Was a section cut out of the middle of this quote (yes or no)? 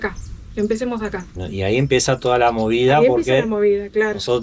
no